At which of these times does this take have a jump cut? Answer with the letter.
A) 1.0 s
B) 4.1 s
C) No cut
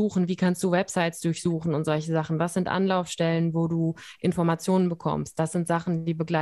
C